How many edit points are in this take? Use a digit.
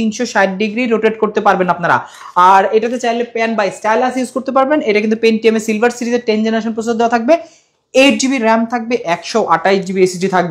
0